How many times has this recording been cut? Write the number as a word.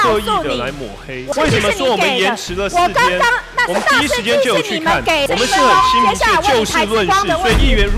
two